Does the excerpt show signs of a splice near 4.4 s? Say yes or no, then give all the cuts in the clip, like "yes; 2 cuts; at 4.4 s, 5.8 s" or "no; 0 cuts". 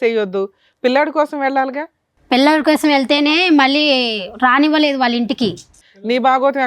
no; 1 cut; at 5.7 s